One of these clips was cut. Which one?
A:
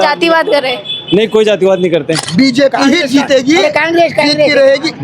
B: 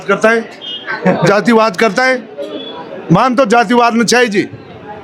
A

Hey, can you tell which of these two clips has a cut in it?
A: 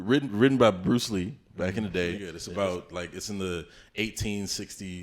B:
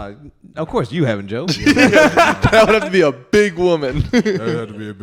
A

